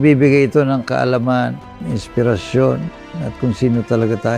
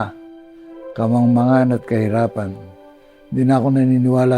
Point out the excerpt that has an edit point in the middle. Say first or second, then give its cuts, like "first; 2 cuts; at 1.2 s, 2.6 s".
second; 1 cut; at 3.3 s